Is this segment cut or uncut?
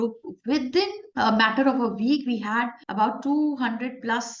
cut